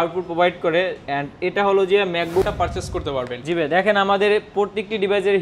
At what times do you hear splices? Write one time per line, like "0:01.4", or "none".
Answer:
0:02.4

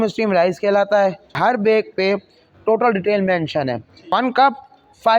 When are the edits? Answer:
0:01.3
0:04.1

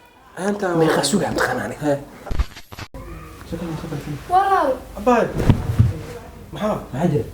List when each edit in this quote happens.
0:02.5

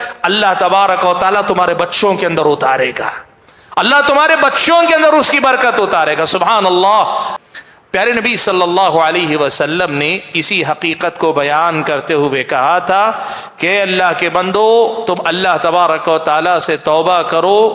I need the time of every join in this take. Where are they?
0:07.3

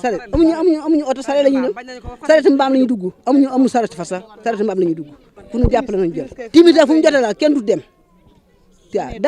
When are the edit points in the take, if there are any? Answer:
0:05.3

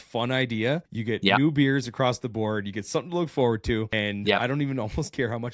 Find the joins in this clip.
0:01.3
0:04.3

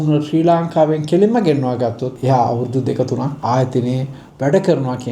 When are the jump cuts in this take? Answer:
0:02.2
0:03.4

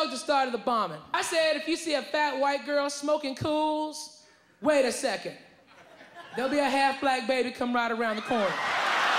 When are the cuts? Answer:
0:01.0

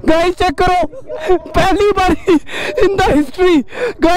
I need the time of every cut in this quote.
none

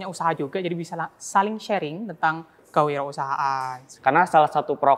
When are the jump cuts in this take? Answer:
0:03.9

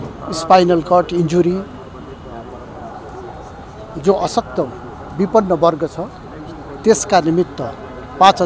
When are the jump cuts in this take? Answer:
none

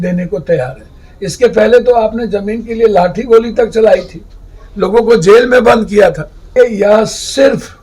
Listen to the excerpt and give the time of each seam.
0:06.5

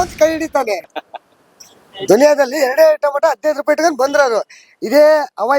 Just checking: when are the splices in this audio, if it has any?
0:00.9

